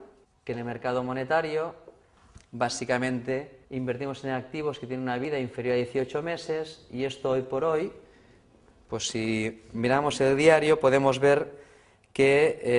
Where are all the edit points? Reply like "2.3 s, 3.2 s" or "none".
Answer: 1.6 s